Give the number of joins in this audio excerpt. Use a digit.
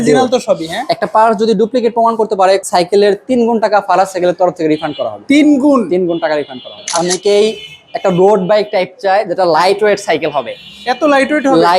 2